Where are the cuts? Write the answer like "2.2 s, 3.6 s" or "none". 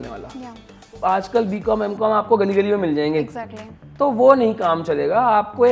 0.9 s